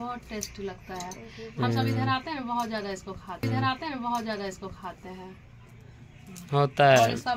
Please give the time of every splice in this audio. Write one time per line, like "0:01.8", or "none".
none